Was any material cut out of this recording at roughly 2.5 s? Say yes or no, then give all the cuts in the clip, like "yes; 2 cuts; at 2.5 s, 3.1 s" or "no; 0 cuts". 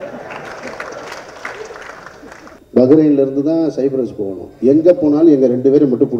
yes; 1 cut; at 2.5 s